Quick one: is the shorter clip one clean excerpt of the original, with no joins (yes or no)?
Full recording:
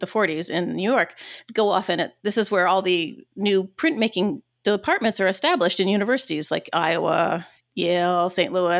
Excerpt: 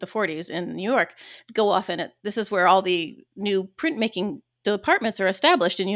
yes